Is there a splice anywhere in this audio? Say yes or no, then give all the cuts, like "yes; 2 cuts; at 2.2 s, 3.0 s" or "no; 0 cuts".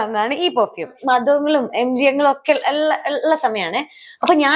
yes; 1 cut; at 0.9 s